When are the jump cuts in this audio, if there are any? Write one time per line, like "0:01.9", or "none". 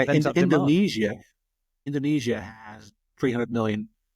0:01.7
0:03.0

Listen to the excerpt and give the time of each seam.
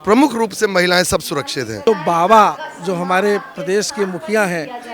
0:01.8

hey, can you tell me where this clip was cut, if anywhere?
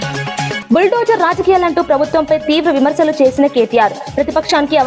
none

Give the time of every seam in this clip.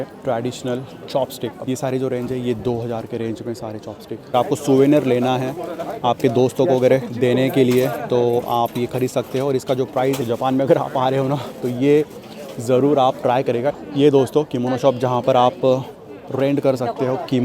0:01.6
0:04.3
0:10.2
0:13.7

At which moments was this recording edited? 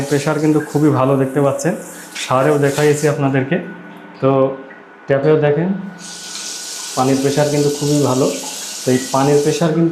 none

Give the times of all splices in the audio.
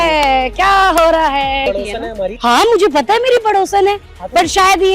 0:01.7

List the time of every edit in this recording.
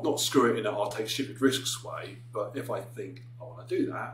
none

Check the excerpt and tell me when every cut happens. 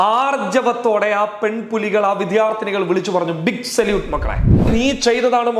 0:04.7

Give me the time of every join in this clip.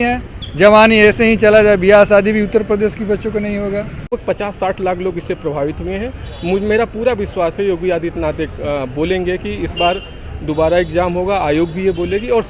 0:04.2

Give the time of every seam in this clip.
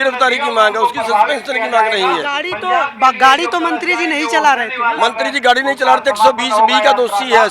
none

